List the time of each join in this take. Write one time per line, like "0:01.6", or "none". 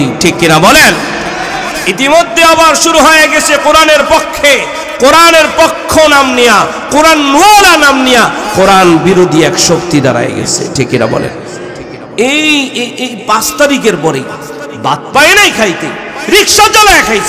0:08.4
0:12.1